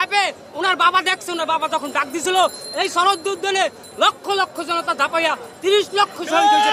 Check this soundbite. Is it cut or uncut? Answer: uncut